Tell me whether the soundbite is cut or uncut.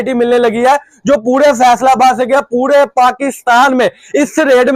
uncut